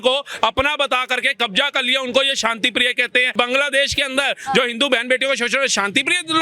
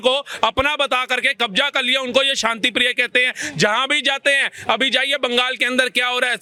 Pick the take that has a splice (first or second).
first